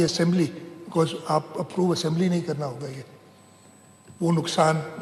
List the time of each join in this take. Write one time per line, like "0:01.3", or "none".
none